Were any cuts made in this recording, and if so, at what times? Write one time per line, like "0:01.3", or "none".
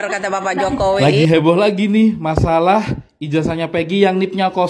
0:01.0